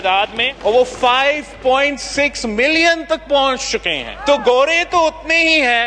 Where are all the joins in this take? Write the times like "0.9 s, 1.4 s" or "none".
none